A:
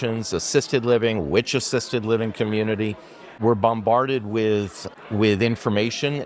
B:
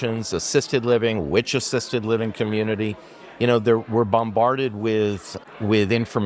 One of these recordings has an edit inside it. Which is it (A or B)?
A